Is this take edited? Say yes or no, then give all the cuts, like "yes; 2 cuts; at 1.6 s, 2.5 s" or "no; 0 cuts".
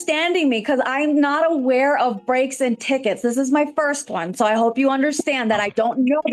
no; 0 cuts